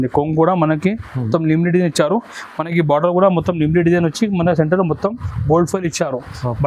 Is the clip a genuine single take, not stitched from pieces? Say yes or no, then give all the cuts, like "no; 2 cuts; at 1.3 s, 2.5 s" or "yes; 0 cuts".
yes; 0 cuts